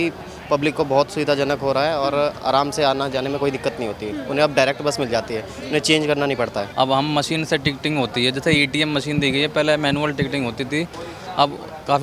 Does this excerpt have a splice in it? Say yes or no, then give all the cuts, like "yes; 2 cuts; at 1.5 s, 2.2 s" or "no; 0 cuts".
yes; 1 cut; at 6.7 s